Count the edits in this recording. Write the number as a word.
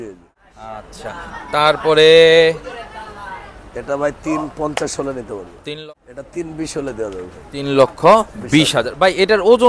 one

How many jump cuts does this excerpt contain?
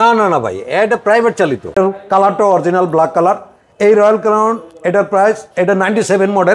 one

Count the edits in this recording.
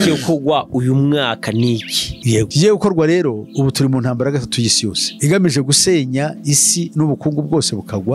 zero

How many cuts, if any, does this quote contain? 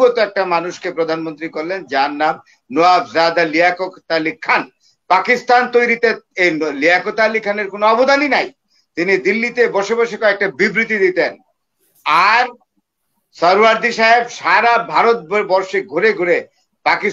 zero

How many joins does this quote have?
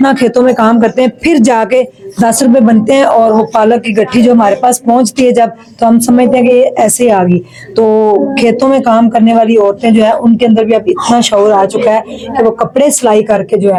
zero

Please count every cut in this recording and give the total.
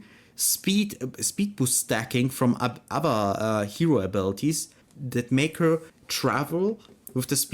two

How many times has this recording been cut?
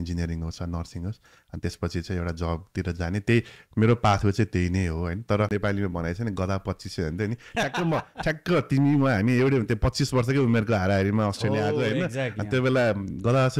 one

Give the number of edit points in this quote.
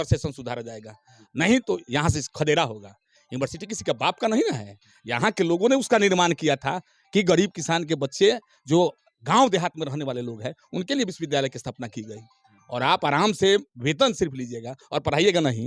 zero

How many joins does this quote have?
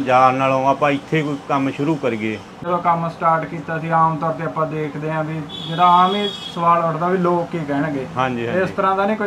one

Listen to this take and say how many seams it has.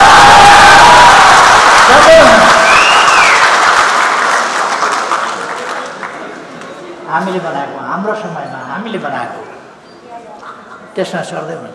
zero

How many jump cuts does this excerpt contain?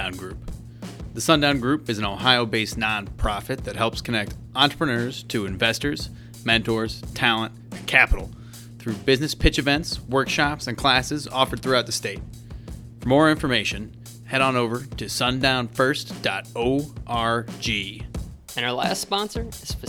one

